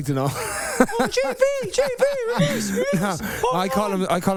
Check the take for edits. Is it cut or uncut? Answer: uncut